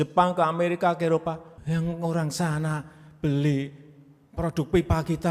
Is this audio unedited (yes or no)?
no